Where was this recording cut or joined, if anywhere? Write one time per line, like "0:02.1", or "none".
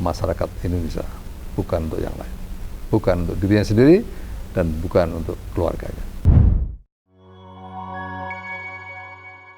0:06.1